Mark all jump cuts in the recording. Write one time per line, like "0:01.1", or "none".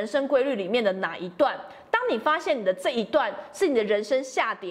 none